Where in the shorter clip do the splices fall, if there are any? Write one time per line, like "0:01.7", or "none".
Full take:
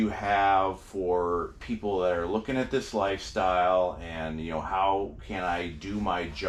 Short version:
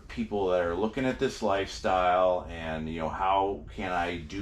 none